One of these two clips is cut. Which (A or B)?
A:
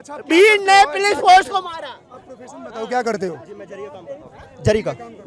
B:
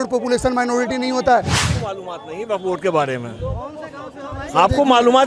B